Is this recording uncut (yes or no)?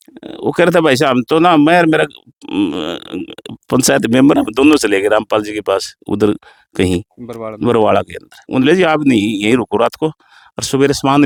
yes